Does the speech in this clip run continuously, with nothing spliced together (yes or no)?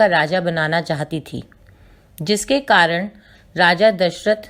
yes